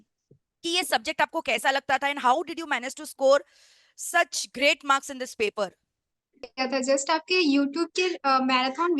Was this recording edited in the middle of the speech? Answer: yes; 1 cut; at 6.5 s

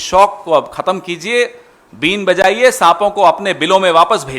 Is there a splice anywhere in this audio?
no; 0 cuts

